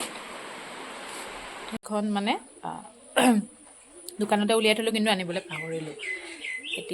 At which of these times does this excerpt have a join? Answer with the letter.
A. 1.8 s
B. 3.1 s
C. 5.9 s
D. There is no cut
A